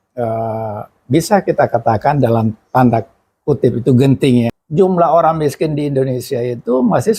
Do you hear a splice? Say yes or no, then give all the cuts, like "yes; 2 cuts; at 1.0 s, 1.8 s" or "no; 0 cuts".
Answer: yes; 1 cut; at 4.6 s